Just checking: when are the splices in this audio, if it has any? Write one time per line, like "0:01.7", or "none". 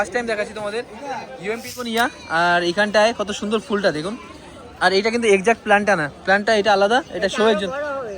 0:01.9